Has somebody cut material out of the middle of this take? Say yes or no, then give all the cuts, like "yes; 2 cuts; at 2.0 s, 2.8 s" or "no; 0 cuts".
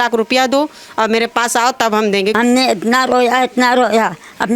yes; 1 cut; at 2.3 s